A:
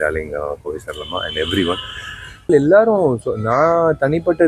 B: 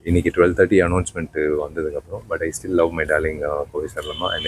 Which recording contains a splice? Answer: A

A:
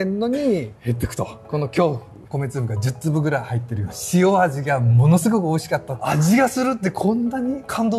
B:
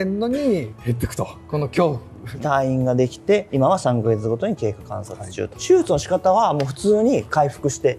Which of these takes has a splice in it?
A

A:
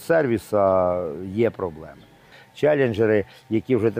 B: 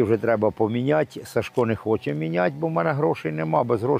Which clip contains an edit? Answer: A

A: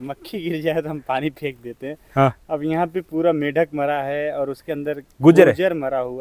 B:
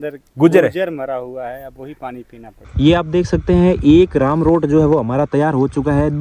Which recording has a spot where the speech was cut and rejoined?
B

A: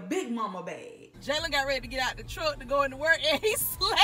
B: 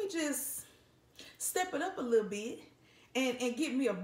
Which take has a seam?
A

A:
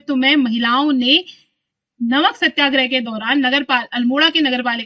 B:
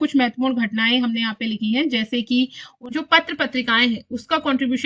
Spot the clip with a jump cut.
B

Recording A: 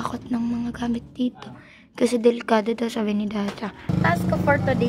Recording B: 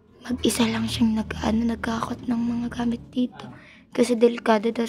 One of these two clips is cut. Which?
A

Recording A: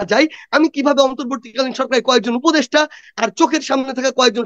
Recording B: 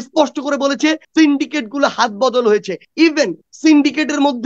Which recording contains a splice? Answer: B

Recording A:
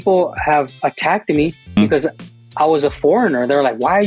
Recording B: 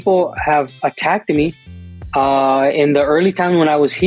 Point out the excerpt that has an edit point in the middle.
A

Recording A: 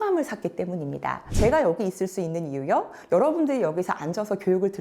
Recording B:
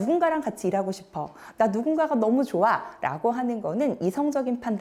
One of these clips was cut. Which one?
A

